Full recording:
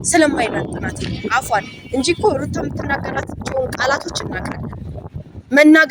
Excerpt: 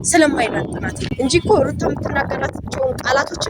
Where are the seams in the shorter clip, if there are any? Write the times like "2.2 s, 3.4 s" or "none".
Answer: 1.0 s